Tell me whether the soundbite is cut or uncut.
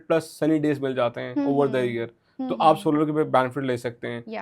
uncut